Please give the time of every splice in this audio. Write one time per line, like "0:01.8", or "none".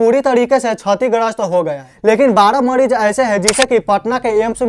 0:01.8